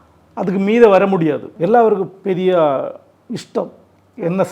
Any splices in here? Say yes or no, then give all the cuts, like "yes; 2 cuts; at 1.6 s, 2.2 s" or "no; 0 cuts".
yes; 1 cut; at 1.5 s